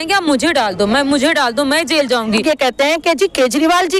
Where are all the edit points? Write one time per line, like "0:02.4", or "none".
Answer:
0:02.4